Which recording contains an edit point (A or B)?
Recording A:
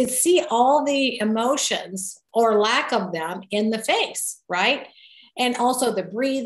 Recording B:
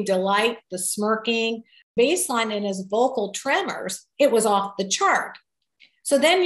B